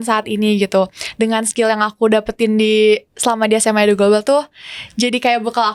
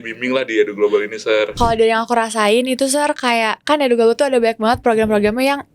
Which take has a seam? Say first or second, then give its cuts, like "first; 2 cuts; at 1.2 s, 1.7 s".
second; 1 cut; at 1.5 s